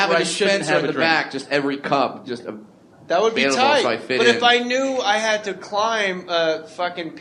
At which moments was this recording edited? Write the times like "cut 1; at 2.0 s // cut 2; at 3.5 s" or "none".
none